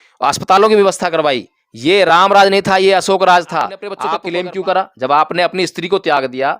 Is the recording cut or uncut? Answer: cut